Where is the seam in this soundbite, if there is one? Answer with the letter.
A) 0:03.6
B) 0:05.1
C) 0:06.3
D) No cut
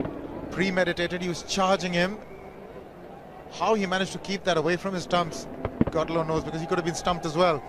D